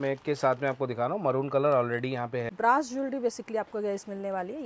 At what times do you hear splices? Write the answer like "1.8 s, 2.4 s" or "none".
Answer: 2.5 s